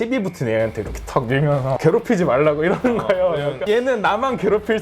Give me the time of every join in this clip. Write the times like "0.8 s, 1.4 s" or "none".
1.8 s